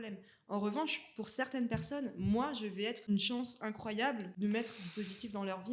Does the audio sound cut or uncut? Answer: cut